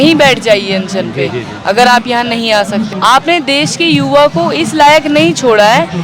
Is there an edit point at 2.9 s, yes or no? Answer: yes